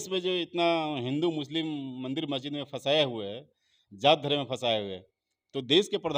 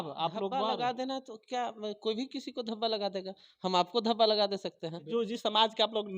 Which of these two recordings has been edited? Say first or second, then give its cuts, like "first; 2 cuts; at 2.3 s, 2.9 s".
second; 1 cut; at 5.1 s